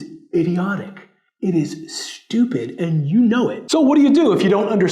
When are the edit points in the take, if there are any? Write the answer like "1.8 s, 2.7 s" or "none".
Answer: 3.6 s